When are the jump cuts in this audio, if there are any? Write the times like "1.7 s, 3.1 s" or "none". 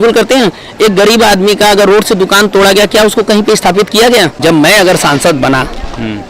4.4 s